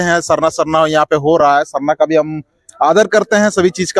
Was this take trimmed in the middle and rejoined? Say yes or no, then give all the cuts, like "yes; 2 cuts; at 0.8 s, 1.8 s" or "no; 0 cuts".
no; 0 cuts